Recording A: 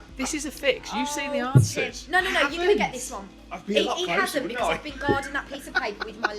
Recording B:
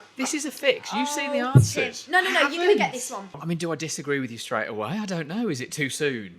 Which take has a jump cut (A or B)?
B